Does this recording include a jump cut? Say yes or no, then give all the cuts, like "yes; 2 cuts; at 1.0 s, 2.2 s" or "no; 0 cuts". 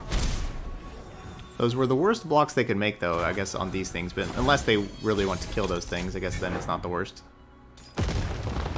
no; 0 cuts